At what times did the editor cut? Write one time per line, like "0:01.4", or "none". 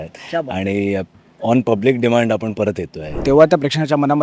0:03.2